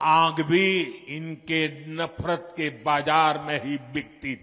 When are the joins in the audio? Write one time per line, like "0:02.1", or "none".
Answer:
0:01.1